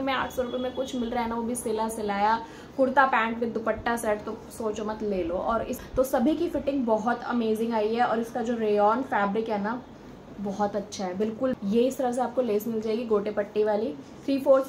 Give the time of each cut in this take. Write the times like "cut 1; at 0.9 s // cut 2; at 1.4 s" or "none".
cut 1; at 5.7 s // cut 2; at 11.5 s